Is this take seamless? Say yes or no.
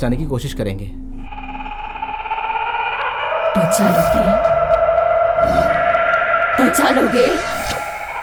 yes